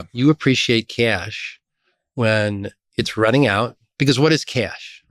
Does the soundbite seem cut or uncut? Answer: cut